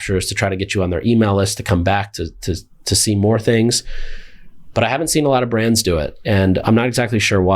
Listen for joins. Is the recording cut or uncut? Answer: cut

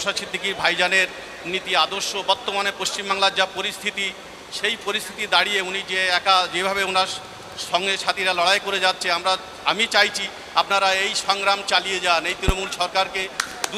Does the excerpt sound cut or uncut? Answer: uncut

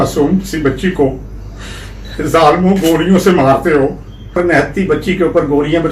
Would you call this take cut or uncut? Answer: cut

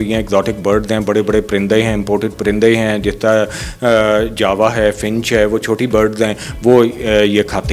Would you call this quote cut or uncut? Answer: uncut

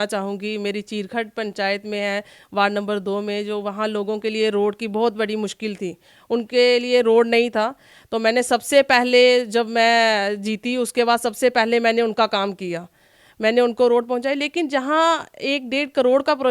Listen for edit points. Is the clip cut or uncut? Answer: uncut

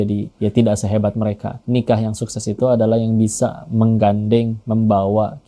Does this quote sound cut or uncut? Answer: cut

